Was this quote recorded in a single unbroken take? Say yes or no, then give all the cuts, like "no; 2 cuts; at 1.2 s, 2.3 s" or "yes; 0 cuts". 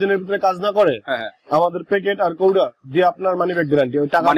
yes; 0 cuts